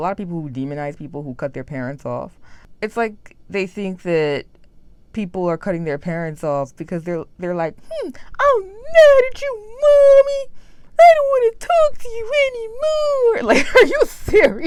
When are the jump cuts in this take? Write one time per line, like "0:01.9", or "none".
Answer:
none